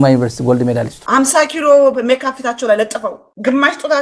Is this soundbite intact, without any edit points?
no; 1 cut; at 1.0 s

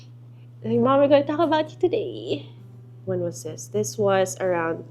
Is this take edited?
yes; 1 cut; at 2.9 s

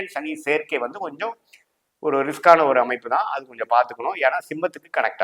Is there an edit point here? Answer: no; 0 cuts

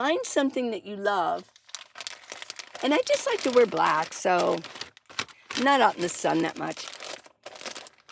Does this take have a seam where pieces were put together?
no; 0 cuts

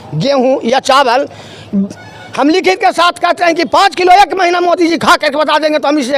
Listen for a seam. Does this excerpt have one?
no; 0 cuts

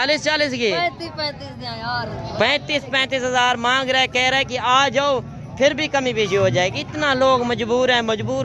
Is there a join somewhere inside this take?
no; 0 cuts

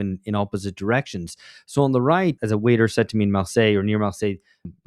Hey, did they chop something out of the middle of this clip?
yes; 1 cut; at 2.4 s

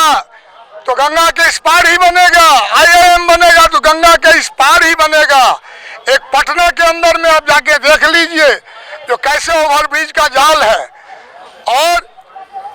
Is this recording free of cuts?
yes; 0 cuts

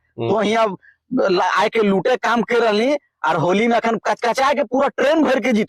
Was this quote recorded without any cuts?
yes; 0 cuts

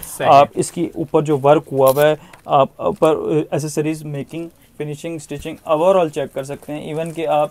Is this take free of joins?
yes; 0 cuts

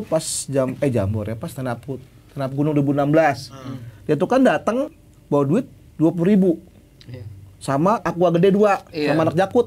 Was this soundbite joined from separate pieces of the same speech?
yes; 2 cuts; at 4.9 s, 8.0 s

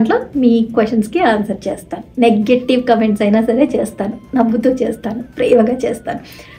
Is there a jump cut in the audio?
no; 0 cuts

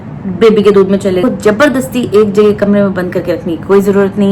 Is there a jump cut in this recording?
yes; 1 cut; at 1.2 s

